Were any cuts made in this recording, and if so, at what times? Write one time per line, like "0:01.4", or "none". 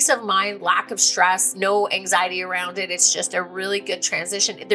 0:01.5